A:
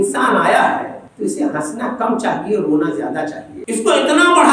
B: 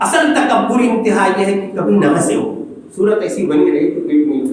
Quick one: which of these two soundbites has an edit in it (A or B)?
A